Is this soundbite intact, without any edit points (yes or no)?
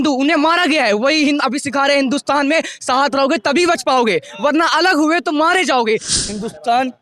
no